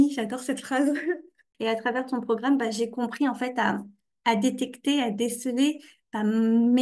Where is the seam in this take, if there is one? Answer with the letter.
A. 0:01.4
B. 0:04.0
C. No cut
A